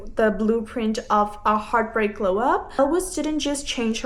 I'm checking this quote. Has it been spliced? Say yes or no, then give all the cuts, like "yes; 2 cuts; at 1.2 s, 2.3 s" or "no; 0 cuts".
yes; 1 cut; at 2.7 s